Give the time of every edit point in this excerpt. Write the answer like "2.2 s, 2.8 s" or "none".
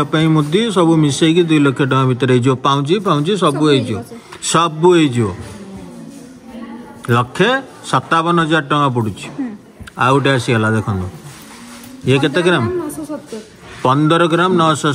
none

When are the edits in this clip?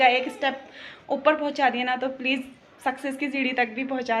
none

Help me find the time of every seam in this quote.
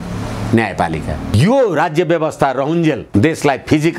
1.3 s

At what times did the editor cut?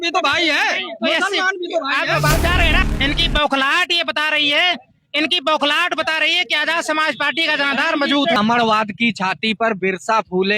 2.8 s, 8.4 s

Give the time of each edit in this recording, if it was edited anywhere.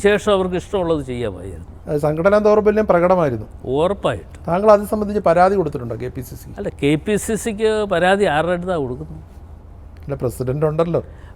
none

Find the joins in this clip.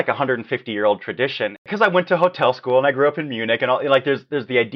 1.7 s

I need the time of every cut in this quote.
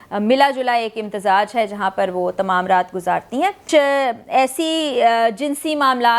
3.6 s

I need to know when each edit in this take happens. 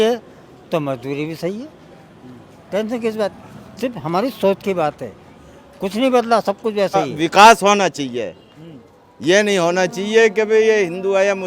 7.1 s

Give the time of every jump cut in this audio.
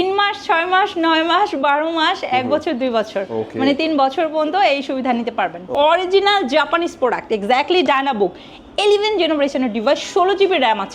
5.6 s

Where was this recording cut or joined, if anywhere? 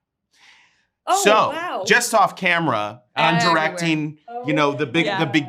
3.0 s

